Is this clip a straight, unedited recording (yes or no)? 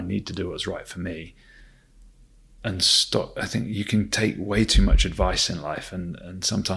yes